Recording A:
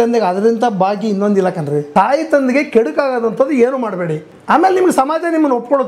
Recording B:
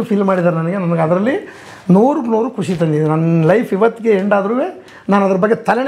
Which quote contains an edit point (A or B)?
A